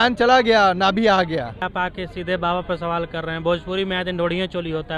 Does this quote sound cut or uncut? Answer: cut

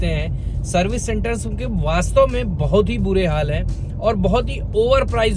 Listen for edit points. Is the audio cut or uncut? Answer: uncut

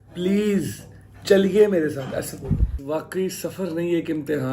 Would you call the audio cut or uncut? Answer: cut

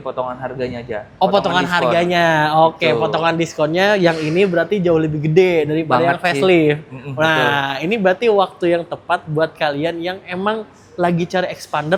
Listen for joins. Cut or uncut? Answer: uncut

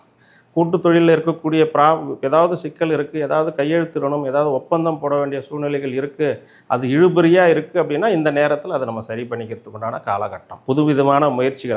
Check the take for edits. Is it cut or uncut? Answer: cut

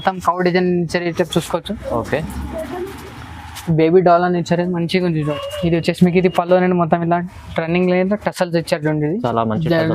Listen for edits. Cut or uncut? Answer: cut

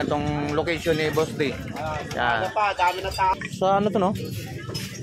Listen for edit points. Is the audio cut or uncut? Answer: cut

